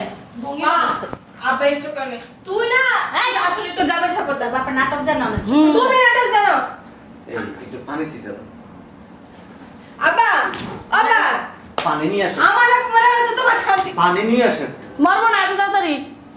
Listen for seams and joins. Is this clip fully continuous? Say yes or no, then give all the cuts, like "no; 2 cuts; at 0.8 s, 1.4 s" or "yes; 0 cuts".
yes; 0 cuts